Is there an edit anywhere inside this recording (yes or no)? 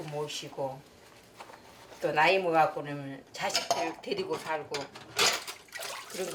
no